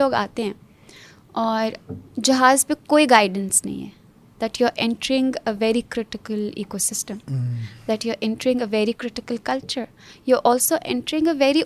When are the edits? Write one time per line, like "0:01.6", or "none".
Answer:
none